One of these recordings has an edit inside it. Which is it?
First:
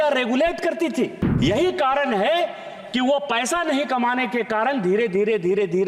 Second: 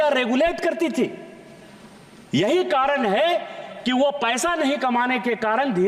first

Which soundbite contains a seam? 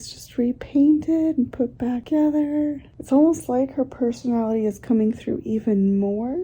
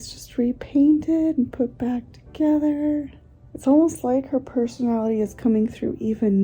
first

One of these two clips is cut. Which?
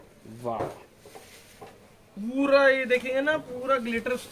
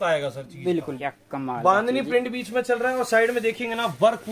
second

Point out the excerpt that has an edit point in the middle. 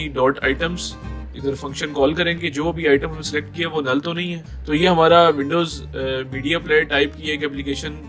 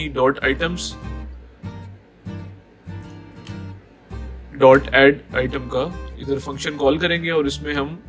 first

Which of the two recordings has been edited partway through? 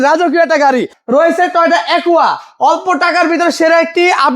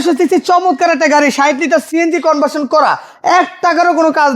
first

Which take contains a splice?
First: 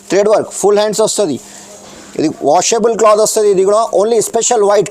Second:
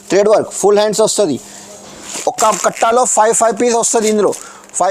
second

